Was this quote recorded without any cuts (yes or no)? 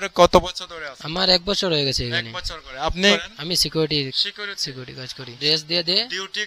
no